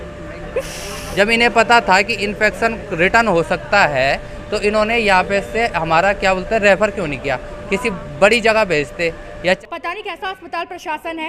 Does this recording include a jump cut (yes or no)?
yes